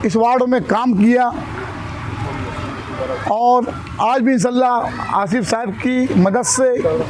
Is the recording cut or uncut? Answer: uncut